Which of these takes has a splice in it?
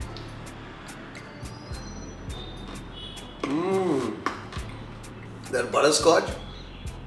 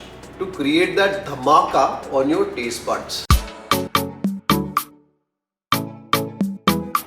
second; 1 cut; at 3.9 s

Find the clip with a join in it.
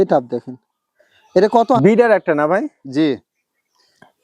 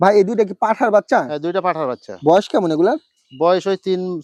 first; 1 cut; at 1.8 s

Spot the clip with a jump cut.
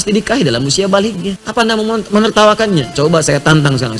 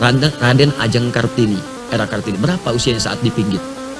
first; 1 cut; at 1.4 s

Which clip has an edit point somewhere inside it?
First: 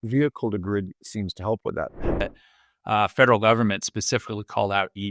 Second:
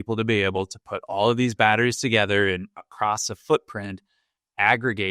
first; 1 cut; at 2.2 s

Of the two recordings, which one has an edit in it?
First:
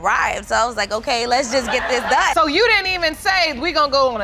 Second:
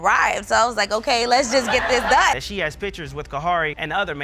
second; 1 cut; at 2.3 s

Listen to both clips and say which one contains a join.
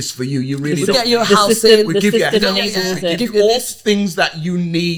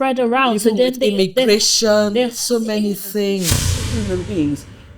second; 1 cut; at 3.8 s

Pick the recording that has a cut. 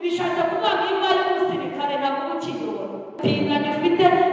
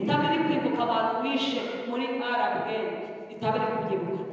first; 1 cut; at 3.1 s

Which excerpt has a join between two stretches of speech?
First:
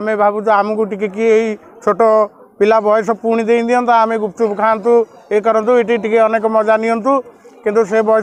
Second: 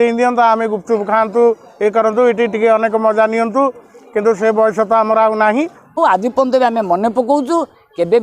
second; 1 cut; at 6.0 s

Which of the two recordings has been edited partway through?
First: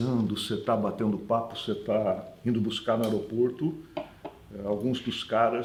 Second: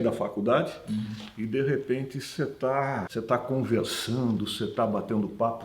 second; 1 cut; at 3.1 s

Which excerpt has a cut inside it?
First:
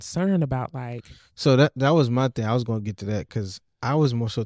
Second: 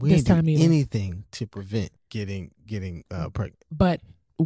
second; 1 cut; at 2.0 s

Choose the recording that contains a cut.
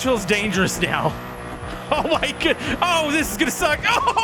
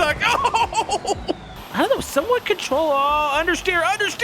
second; 1 cut; at 1.5 s

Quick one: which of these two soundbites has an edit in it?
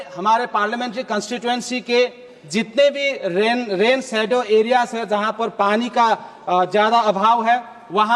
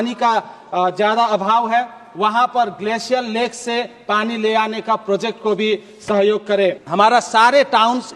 second; 1 cut; at 6.8 s

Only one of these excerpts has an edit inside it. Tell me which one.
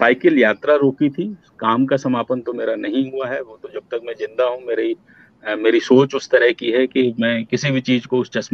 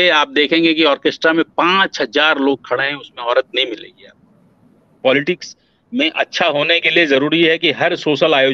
second; 1 cut; at 4.9 s

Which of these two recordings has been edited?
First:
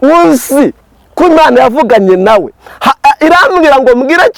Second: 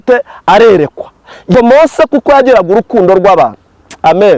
second; 1 cut; at 1.5 s

